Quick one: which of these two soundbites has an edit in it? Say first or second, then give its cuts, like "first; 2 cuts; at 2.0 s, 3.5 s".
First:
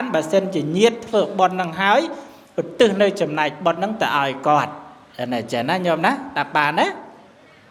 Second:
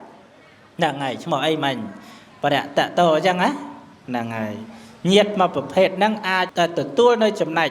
second; 1 cut; at 6.5 s